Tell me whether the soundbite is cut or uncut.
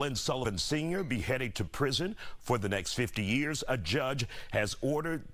uncut